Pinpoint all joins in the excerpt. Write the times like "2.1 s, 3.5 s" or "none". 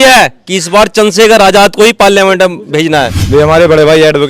3.2 s